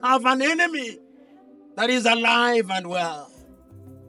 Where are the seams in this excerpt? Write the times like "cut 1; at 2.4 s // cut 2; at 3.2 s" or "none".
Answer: none